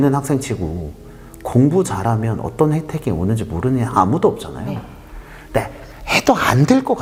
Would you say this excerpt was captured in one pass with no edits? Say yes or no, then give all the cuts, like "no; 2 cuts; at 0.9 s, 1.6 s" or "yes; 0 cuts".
yes; 0 cuts